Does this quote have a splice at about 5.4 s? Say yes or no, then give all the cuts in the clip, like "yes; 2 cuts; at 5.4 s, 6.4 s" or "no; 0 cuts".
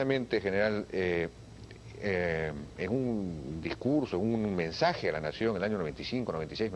yes; 1 cut; at 5.4 s